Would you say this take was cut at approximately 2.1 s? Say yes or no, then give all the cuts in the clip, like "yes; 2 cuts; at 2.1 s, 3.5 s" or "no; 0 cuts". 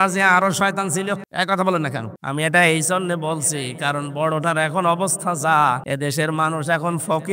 yes; 3 cuts; at 1.3 s, 2.1 s, 5.9 s